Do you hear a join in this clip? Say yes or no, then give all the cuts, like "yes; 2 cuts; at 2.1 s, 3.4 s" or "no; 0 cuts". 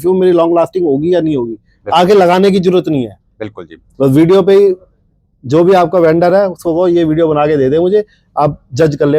no; 0 cuts